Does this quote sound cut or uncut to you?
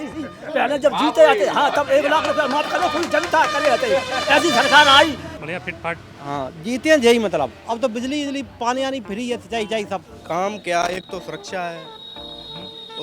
cut